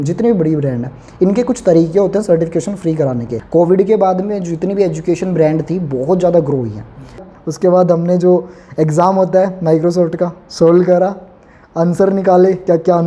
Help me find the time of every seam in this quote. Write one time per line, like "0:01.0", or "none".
0:03.4
0:07.2

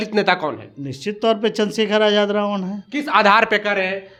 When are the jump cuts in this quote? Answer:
none

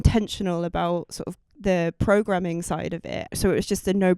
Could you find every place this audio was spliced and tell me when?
0:03.2

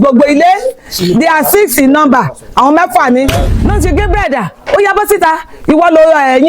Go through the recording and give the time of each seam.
0:03.4

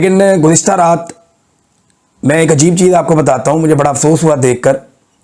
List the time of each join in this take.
none

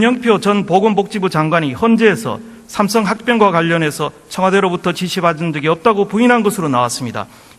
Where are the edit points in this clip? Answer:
0:03.5

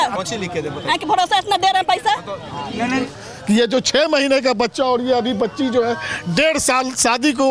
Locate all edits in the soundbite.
0:03.0

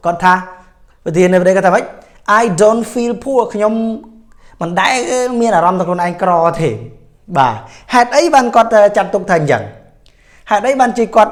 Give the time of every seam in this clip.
none

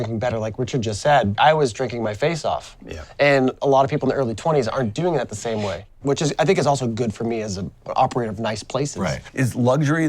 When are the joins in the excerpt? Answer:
0:01.3
0:05.9
0:07.9
0:09.3

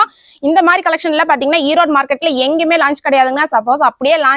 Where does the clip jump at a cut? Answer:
none

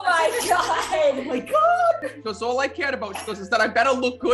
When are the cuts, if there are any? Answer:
0:02.2

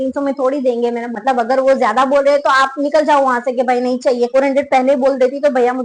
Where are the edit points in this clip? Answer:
0:01.1
0:04.3

